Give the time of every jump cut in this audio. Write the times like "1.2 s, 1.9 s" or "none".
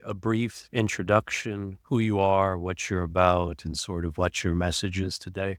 none